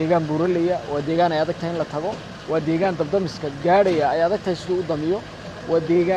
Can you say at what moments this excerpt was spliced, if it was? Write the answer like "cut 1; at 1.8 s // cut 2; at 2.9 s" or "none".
cut 1; at 2.3 s